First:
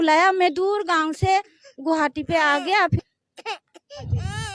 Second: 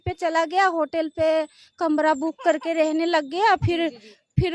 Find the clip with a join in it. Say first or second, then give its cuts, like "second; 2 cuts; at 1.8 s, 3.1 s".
first; 1 cut; at 3.0 s